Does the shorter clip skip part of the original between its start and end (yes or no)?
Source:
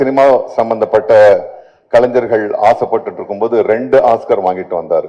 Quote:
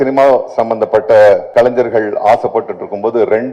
yes